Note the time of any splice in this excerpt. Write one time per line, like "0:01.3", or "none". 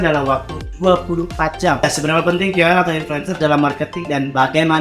0:01.8